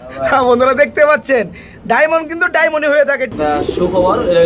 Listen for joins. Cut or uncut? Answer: cut